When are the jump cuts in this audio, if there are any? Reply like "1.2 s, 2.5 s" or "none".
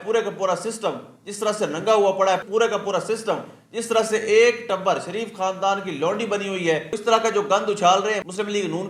6.9 s